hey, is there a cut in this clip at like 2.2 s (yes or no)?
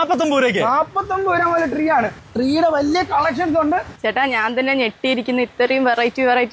yes